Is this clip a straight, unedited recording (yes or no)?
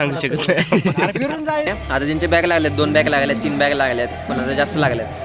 no